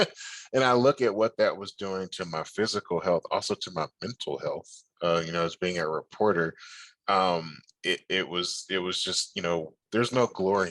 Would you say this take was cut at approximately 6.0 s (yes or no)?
no